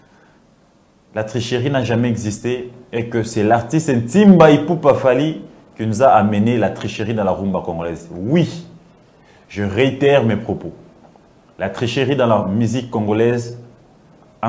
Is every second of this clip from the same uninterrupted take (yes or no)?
yes